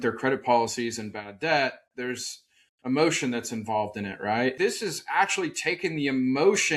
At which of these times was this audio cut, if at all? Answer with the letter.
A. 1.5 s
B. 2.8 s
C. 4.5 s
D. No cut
C